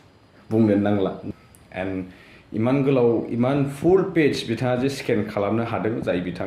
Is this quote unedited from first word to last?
no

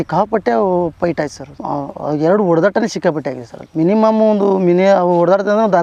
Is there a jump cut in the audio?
no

